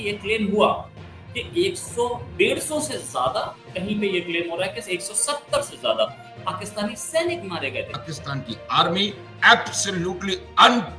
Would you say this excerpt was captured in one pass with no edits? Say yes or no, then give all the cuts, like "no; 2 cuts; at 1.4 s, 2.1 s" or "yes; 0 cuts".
no; 1 cut; at 8.0 s